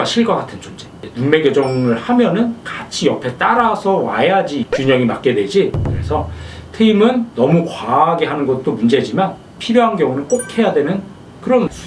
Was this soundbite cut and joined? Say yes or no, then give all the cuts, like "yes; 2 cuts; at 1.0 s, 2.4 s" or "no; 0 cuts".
no; 0 cuts